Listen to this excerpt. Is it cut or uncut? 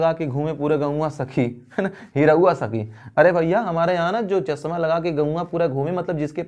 uncut